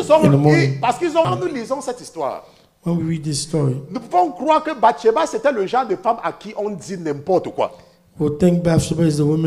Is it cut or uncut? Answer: cut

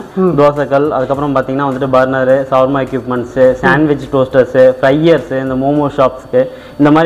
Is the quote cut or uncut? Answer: uncut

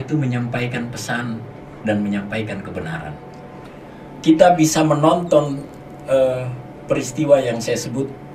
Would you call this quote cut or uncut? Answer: cut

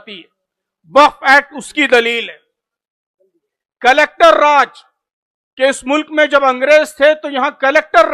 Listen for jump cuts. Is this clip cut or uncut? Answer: uncut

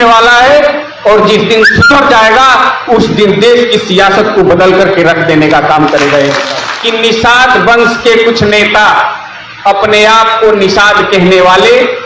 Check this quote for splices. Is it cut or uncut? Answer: cut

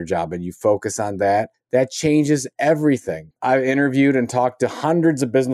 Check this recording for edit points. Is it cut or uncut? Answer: cut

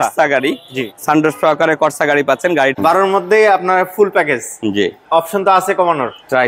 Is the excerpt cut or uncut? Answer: cut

